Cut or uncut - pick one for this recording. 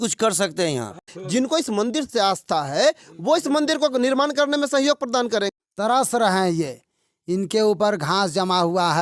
cut